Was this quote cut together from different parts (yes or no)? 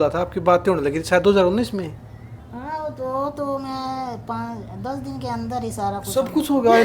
no